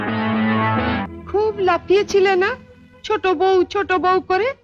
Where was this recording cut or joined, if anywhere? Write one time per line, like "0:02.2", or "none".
0:01.1